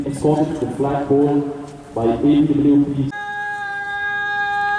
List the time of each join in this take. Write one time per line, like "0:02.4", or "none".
0:03.2